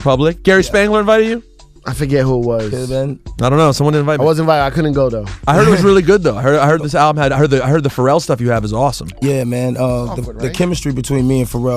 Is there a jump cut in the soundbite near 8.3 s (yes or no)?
no